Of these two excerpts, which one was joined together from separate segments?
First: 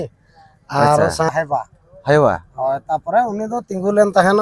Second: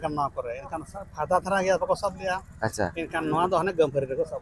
first; 1 cut; at 1.3 s

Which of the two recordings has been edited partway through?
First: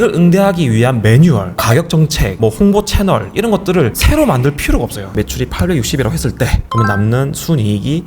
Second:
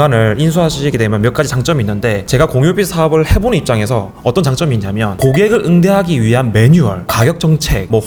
first; 1 cut; at 5.1 s

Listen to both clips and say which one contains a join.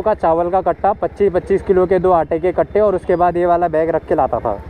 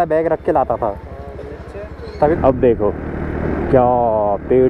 second; 1 cut; at 2.0 s

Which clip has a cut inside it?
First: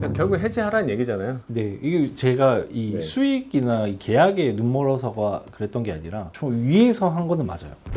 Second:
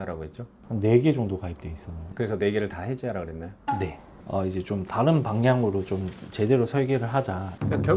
second; 1 cut; at 4.1 s

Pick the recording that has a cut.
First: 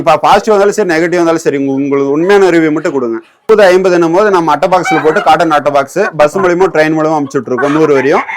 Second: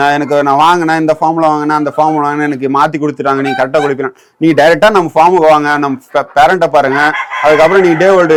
first; 1 cut; at 3.4 s

